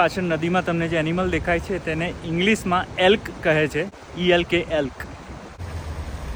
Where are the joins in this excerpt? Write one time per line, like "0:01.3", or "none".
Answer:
none